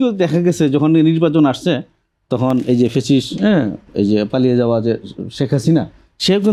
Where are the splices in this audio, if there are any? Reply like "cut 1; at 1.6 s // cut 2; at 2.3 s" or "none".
none

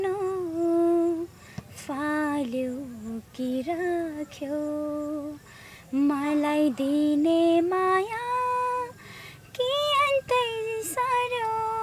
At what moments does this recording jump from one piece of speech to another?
none

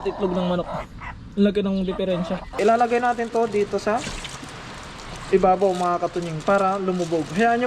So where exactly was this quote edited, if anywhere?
cut 1; at 2.6 s

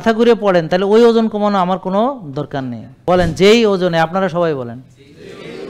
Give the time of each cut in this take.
cut 1; at 2.9 s

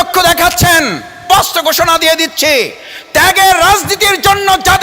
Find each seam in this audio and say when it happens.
cut 1; at 1.2 s

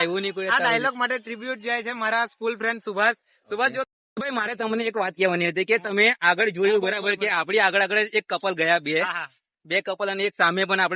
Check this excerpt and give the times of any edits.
cut 1; at 3.9 s

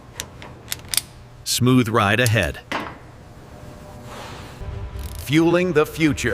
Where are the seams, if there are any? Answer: cut 1; at 4.6 s

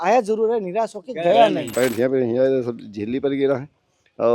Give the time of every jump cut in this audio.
cut 1; at 1.7 s

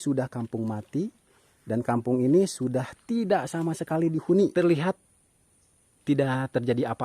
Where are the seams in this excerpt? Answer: cut 1; at 4.5 s

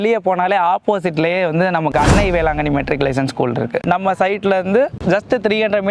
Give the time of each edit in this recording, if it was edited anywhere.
none

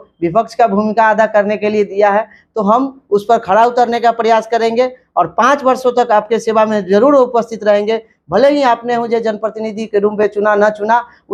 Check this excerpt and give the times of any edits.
none

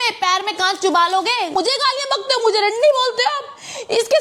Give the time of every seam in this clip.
cut 1; at 1.5 s

